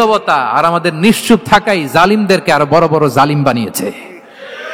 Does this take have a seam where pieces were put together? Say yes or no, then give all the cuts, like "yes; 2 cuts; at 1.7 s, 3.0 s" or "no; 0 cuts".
no; 0 cuts